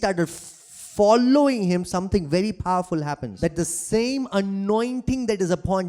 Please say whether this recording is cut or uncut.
cut